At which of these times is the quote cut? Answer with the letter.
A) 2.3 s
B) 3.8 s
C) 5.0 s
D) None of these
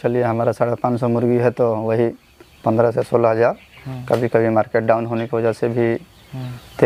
D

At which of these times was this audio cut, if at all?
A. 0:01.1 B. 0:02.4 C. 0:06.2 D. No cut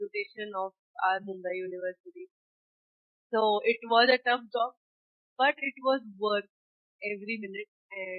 D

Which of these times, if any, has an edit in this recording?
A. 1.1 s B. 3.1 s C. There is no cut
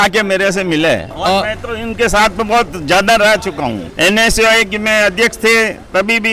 C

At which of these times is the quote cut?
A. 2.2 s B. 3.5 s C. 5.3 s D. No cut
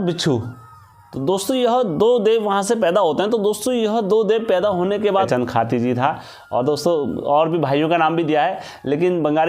C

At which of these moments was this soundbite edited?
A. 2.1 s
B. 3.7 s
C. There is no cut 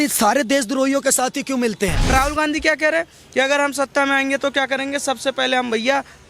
A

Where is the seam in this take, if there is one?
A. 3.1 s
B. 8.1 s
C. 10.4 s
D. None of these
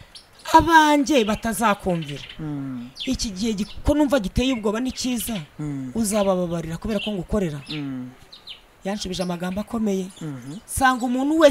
D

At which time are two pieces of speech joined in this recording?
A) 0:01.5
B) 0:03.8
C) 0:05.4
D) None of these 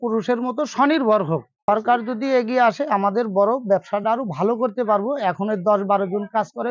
A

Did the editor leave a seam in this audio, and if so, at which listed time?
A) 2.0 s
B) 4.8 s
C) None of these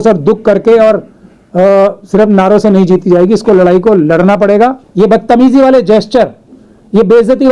B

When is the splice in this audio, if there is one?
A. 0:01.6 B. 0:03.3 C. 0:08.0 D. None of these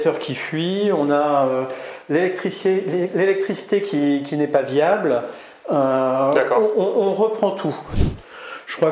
C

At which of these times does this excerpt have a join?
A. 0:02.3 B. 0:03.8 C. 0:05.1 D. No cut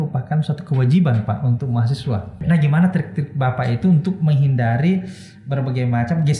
A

